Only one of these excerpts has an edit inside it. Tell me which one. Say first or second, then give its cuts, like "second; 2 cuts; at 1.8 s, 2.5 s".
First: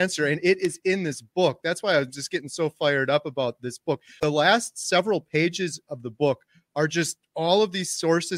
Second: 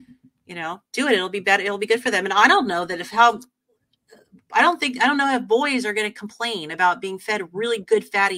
first; 1 cut; at 4.1 s